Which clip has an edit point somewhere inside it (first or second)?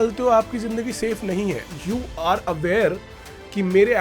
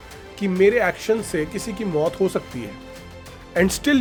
first